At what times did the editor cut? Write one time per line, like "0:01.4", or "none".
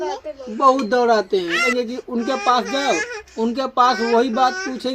0:01.6

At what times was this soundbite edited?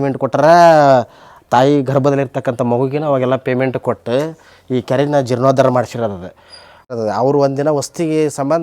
0:06.9

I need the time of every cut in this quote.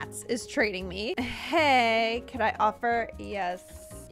none

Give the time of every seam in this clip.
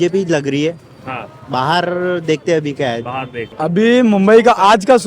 0:03.4

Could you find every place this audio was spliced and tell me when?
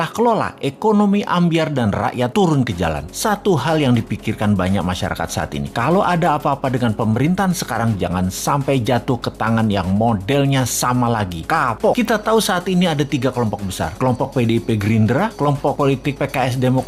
0:12.0

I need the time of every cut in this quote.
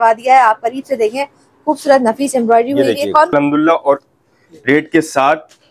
0:03.3

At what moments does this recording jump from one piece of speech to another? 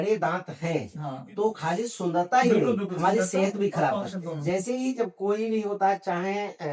0:04.3

